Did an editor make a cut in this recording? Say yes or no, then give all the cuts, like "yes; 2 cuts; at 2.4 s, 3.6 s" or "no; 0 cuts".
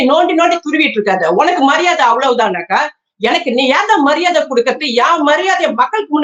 no; 0 cuts